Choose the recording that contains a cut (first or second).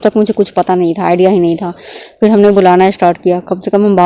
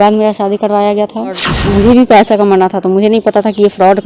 second